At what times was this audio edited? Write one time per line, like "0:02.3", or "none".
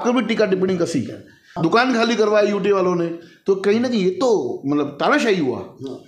0:01.4